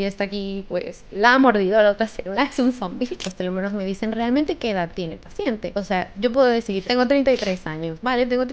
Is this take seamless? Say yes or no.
no